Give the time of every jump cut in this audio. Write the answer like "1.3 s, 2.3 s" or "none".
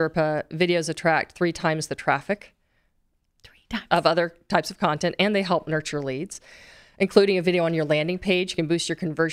none